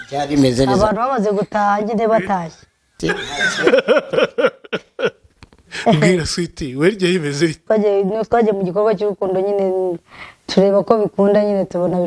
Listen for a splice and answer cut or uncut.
cut